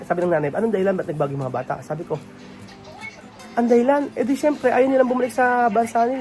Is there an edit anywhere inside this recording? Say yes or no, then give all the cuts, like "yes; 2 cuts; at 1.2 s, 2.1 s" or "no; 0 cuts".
no; 0 cuts